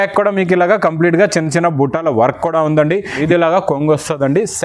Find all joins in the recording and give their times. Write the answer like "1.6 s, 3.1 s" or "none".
3.2 s